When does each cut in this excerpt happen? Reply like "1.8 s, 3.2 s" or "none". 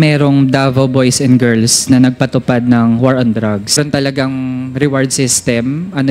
3.7 s

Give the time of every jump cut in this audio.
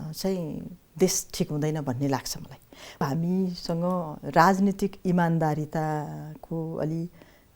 3.0 s

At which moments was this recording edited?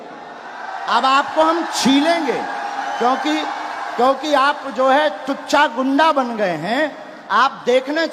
none

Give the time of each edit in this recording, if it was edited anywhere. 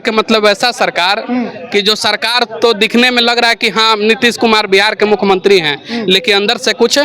none

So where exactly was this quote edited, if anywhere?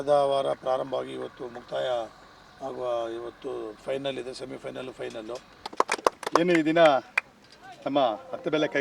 5.6 s

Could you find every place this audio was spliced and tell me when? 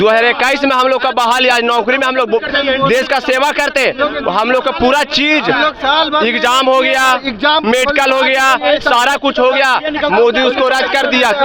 none

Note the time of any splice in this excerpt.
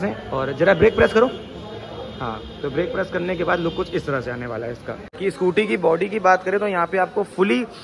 5.2 s

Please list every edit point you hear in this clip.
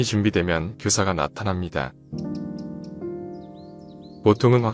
none

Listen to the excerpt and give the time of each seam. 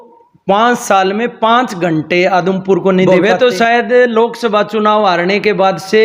3.1 s

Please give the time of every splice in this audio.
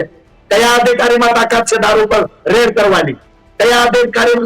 none

